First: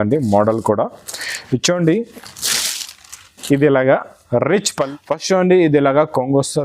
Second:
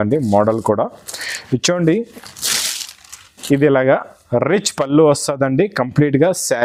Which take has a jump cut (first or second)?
first